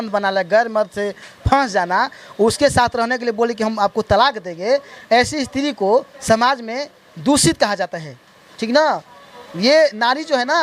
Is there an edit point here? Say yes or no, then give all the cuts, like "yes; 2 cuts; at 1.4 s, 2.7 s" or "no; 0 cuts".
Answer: no; 0 cuts